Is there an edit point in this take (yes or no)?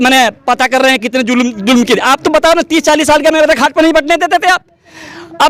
no